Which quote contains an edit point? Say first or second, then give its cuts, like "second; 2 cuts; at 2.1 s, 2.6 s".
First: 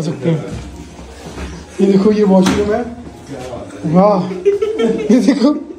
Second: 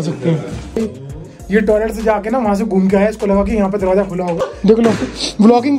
second; 2 cuts; at 0.8 s, 4.4 s